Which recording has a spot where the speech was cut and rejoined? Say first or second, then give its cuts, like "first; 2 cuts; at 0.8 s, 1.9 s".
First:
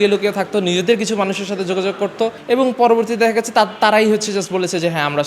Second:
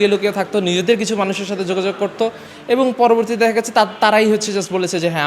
first; 1 cut; at 2.4 s